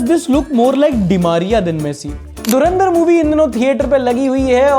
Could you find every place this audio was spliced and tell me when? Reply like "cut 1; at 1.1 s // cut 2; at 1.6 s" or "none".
cut 1; at 2.5 s